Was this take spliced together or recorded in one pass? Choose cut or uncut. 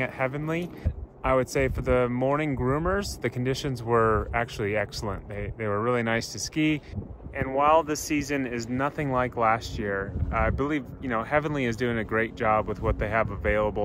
cut